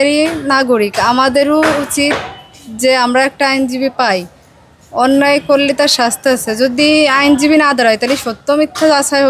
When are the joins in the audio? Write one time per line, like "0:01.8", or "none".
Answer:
none